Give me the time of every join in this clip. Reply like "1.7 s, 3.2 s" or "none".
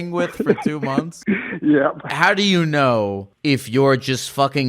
1.1 s, 2.1 s, 3.3 s